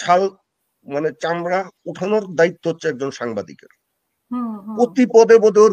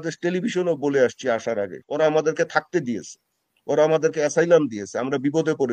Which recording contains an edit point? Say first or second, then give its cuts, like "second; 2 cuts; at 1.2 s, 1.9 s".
second; 1 cut; at 1.8 s